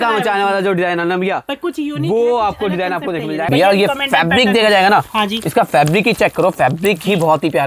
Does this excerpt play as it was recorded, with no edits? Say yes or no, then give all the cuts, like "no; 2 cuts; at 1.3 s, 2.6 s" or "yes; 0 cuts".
no; 1 cut; at 3.5 s